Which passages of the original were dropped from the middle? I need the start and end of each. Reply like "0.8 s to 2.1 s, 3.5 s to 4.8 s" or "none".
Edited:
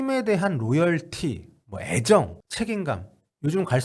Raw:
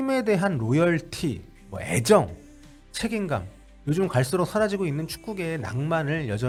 2.4 s to 2.8 s